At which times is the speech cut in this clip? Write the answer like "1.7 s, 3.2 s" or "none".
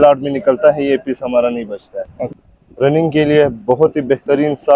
2.4 s